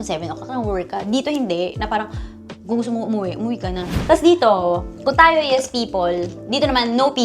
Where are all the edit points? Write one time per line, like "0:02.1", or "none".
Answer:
0:03.9